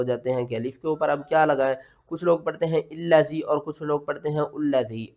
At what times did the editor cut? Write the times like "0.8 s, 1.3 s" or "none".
none